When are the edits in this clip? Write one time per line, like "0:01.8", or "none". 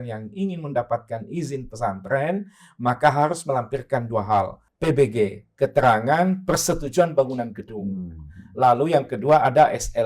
0:04.6